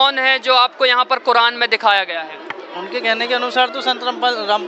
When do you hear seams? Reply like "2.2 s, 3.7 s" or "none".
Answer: none